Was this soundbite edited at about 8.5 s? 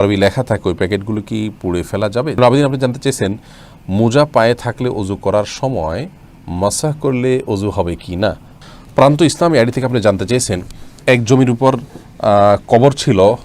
yes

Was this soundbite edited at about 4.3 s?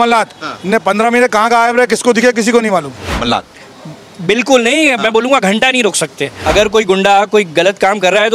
no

